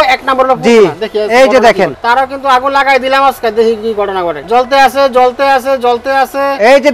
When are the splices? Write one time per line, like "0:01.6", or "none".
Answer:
0:02.0
0:04.4